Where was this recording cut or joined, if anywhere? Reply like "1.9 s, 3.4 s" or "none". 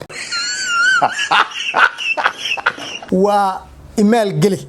2.9 s